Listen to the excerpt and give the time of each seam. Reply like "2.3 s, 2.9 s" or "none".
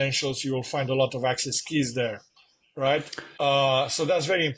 3.2 s